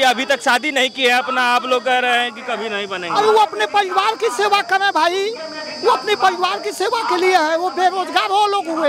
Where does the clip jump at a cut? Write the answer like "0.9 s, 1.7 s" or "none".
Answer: none